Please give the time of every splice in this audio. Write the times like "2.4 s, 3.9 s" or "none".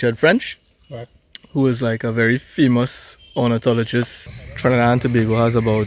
4.2 s